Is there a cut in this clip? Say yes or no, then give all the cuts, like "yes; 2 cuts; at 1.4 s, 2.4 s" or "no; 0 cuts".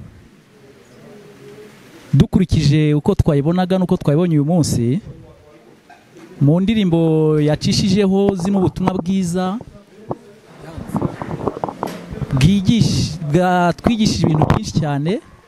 no; 0 cuts